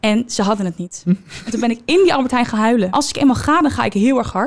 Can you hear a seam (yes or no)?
yes